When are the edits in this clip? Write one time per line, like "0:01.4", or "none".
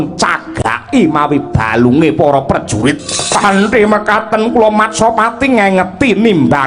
0:03.1